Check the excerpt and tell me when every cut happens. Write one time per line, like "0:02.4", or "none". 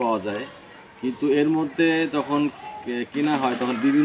none